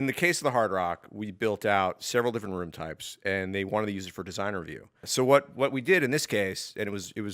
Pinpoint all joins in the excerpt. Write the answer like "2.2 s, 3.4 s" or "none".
5.1 s